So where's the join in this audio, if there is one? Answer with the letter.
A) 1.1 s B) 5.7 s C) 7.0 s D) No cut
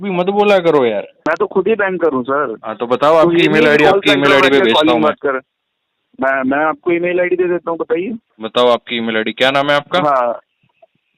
A